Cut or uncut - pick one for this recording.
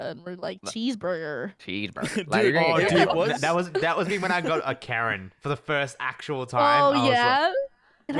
uncut